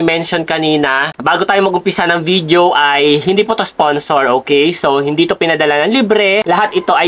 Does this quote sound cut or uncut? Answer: uncut